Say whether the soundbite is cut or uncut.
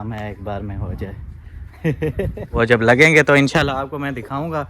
cut